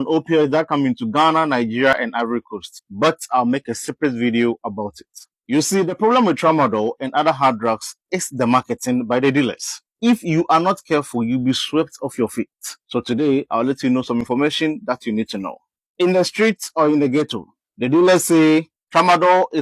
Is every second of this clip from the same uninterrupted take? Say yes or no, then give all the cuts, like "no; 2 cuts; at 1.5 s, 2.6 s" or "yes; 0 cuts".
yes; 0 cuts